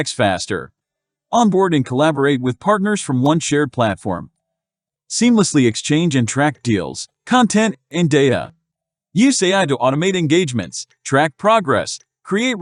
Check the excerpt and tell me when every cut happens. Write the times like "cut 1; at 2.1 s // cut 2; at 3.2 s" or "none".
none